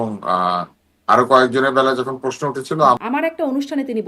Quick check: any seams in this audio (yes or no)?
yes